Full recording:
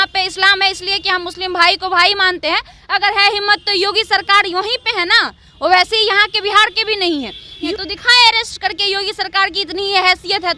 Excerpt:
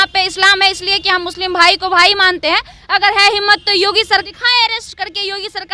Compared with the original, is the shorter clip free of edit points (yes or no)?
no